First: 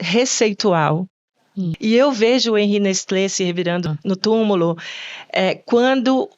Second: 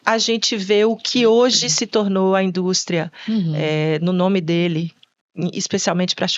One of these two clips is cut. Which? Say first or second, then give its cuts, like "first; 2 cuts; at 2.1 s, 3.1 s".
first; 2 cuts; at 1.7 s, 3.9 s